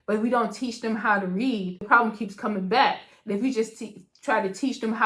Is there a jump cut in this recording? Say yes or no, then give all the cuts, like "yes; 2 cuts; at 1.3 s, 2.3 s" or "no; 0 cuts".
yes; 1 cut; at 1.8 s